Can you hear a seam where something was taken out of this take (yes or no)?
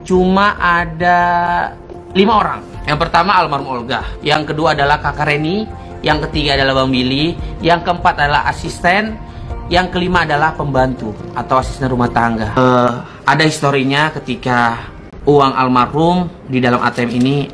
yes